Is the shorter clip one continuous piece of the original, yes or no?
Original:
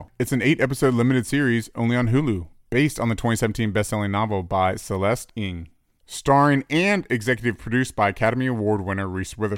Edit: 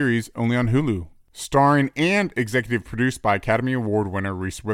no